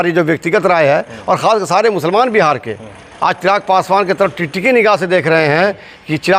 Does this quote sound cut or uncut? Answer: uncut